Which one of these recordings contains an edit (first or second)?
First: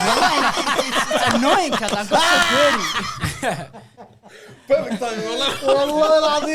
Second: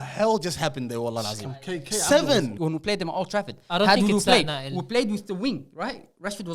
second